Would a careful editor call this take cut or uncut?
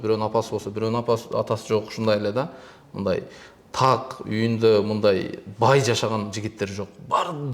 uncut